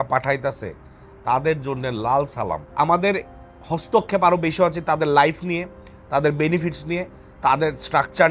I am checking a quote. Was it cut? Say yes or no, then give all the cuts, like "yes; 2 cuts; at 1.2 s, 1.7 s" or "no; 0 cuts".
yes; 1 cut; at 2.7 s